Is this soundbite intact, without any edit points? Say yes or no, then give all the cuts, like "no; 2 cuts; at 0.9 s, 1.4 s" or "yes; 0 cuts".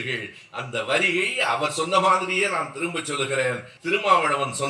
no; 1 cut; at 3.7 s